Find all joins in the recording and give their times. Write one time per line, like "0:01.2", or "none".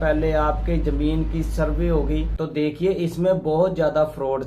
0:02.3